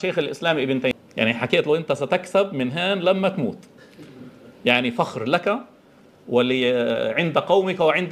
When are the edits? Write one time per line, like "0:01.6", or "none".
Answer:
0:00.9